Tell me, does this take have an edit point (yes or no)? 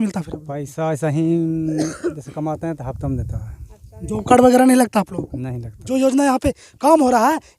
yes